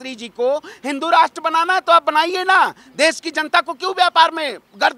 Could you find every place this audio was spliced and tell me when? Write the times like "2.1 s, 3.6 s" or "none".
none